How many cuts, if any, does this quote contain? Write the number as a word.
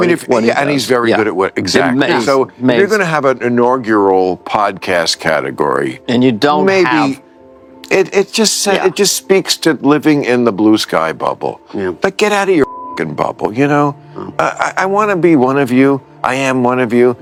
zero